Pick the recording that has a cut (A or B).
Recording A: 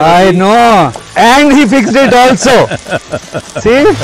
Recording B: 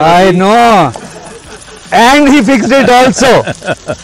A